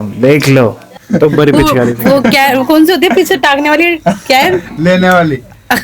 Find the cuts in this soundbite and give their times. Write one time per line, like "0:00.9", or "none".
0:00.9